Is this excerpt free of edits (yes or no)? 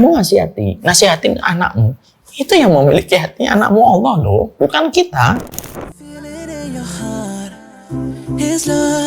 no